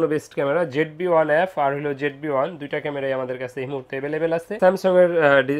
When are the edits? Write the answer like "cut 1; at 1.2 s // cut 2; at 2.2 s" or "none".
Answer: cut 1; at 4.6 s